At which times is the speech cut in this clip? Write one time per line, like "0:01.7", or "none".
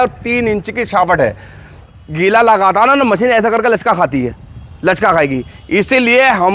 0:01.8